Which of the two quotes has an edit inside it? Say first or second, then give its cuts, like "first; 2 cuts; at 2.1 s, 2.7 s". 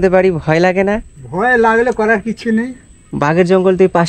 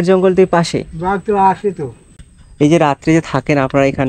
second; 1 cut; at 2.1 s